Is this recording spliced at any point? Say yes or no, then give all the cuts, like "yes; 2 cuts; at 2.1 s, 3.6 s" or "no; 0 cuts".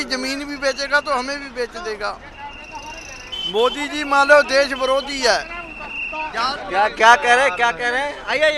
no; 0 cuts